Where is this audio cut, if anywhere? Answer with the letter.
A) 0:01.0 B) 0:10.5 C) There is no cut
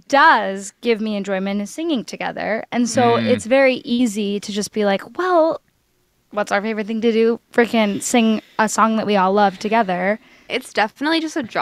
B